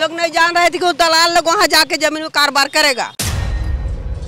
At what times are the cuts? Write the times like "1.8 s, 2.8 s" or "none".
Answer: 3.2 s